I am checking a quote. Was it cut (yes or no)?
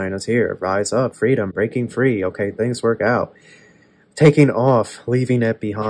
no